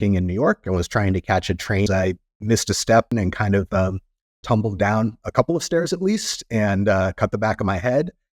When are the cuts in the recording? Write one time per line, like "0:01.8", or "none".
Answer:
0:01.9
0:03.1